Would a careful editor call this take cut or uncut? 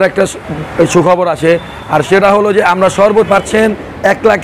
cut